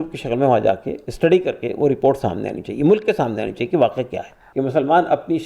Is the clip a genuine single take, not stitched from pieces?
no; 1 cut; at 4.4 s

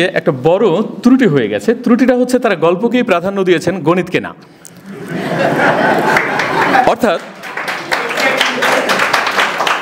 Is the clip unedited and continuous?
yes; 0 cuts

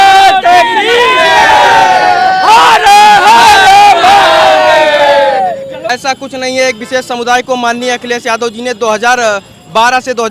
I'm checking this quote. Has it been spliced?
yes; 1 cut; at 5.8 s

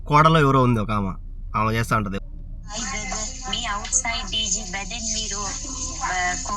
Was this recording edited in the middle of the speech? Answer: yes; 1 cut; at 2.2 s

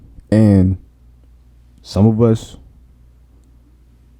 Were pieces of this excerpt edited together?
no; 0 cuts

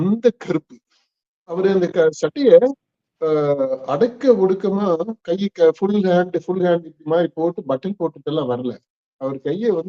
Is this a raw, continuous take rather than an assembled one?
no; 1 cut; at 1.6 s

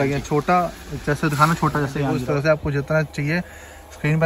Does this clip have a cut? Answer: yes; 1 cut; at 2.1 s

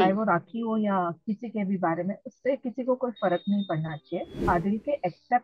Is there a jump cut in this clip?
yes; 1 cut; at 4.4 s

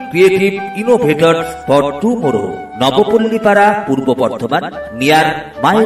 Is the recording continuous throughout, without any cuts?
yes; 0 cuts

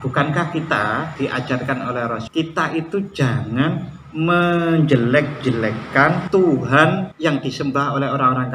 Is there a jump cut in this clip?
yes; 4 cuts; at 1.1 s, 2.3 s, 6.2 s, 7.1 s

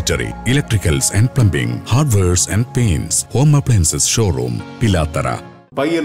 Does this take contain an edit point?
no; 0 cuts

